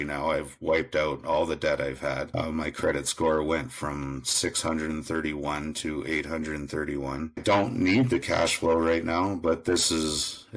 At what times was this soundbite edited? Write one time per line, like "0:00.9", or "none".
0:02.3
0:07.4